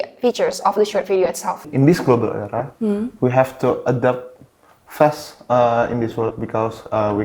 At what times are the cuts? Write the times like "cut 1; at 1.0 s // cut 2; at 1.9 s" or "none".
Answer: cut 1; at 1.7 s